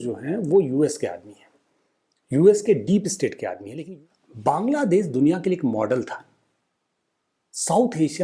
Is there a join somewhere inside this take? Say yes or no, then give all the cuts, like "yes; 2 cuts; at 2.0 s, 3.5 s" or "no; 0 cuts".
yes; 1 cut; at 3.6 s